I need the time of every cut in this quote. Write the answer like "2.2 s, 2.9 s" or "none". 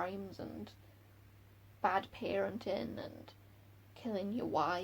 none

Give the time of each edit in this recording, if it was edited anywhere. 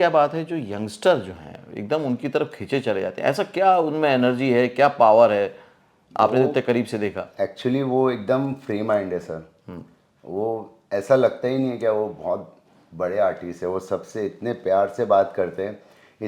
none

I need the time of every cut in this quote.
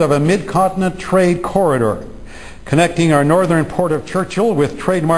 2.2 s

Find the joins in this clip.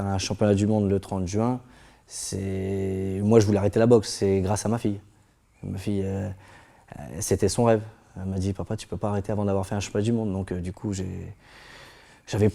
none

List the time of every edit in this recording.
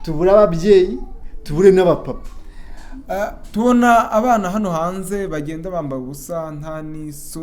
none

